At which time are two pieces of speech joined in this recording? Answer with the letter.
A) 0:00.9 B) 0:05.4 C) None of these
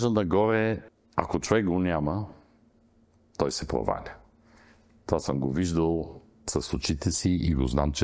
A